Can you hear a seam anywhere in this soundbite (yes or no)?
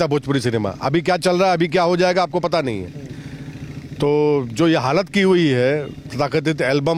no